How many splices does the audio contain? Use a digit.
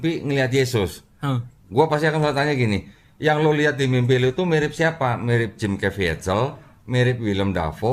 0